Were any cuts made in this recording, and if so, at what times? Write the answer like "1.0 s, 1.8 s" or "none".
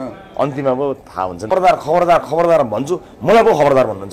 1.5 s